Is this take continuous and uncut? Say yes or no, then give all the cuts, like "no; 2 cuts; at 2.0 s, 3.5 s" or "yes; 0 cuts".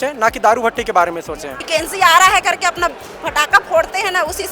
no; 1 cut; at 1.5 s